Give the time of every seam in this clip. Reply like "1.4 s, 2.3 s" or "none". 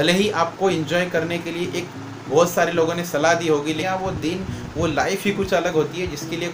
3.8 s